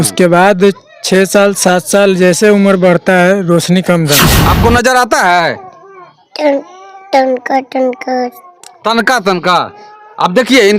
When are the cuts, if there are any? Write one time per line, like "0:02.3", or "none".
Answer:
0:04.3